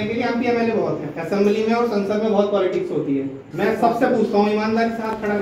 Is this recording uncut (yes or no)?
no